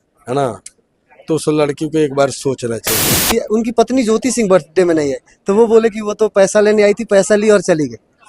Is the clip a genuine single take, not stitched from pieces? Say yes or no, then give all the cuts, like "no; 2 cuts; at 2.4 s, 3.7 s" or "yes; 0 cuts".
no; 1 cut; at 3.3 s